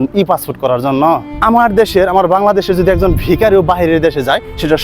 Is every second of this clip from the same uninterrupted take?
no; 1 cut; at 1.3 s

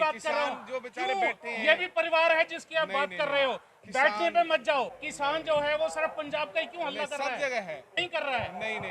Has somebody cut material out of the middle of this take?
yes; 2 cuts; at 5.0 s, 7.9 s

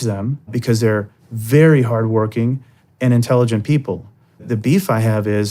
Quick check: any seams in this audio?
yes; 2 cuts; at 0.9 s, 4.4 s

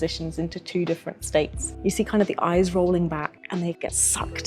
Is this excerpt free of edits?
no; 2 cuts; at 1.7 s, 3.7 s

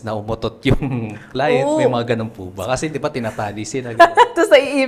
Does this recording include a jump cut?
no; 0 cuts

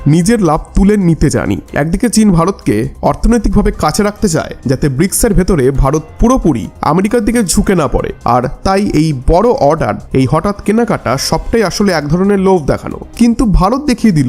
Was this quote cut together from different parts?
yes; 2 cuts; at 1.6 s, 13.0 s

